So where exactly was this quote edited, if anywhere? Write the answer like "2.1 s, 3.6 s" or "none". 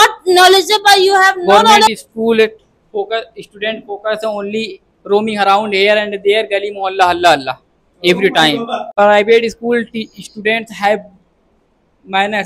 1.9 s, 8.8 s